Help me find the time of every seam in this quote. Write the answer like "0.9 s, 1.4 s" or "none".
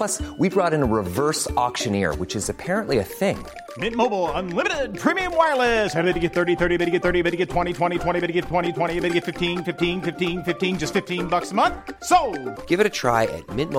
none